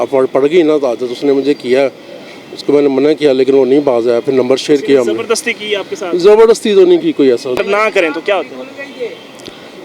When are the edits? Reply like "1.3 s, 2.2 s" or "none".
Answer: 7.6 s